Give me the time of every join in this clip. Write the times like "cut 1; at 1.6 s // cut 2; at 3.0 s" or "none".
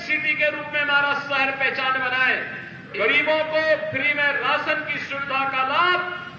cut 1; at 3.0 s